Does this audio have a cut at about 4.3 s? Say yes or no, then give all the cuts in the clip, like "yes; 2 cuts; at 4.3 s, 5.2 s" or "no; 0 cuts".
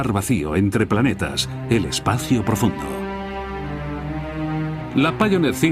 no; 1 cut; at 1.6 s